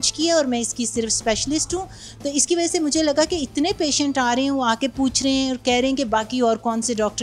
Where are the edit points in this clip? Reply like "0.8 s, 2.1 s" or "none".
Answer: none

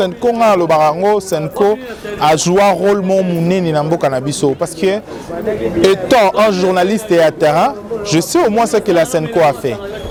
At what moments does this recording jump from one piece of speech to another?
none

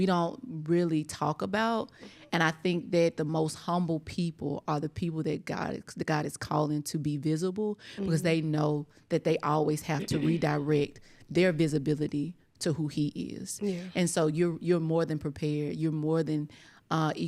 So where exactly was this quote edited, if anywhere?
none

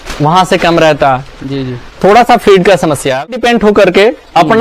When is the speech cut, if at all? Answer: 3.3 s

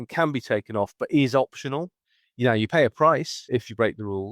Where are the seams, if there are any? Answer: 3.4 s

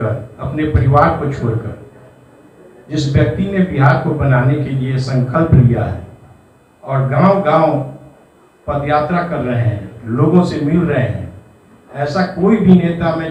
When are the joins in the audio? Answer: none

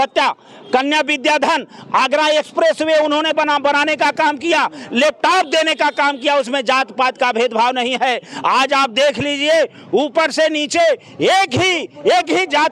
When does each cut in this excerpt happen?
none

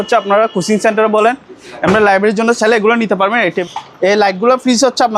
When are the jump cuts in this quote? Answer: 3.6 s

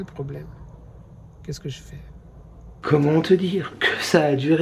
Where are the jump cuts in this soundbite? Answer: 2.8 s

